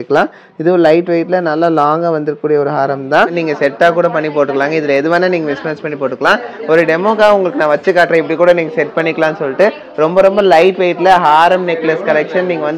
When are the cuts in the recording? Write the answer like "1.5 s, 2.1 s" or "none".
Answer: 3.3 s